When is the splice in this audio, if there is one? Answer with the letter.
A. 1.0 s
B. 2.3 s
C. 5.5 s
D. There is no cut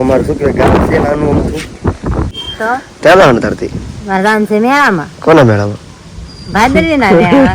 B